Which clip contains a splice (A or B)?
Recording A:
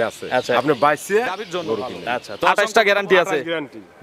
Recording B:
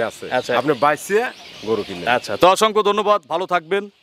A